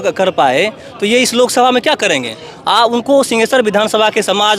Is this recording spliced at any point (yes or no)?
no